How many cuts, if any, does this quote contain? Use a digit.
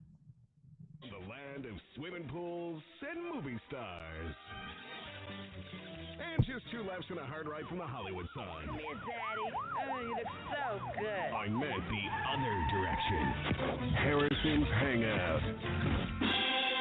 1